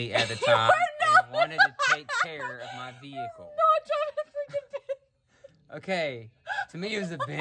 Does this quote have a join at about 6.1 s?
no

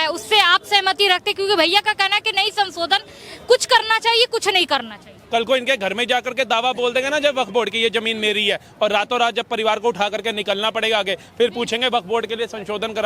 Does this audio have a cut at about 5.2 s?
yes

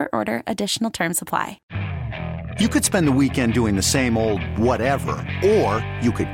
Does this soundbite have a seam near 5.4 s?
no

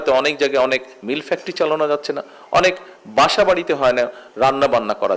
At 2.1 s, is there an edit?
no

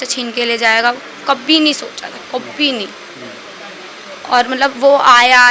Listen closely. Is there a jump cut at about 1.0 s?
no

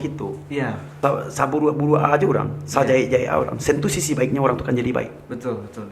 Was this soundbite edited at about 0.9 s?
yes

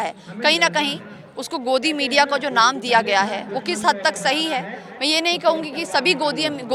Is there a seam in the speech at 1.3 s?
no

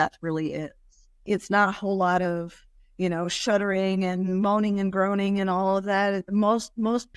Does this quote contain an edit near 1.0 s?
no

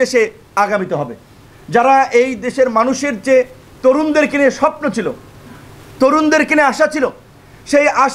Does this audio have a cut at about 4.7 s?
no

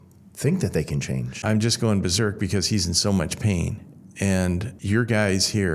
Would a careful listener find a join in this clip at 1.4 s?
yes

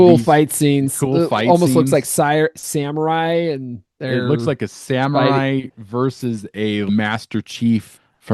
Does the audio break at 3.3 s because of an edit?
no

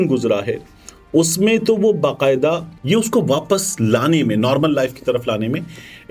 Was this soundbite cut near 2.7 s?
yes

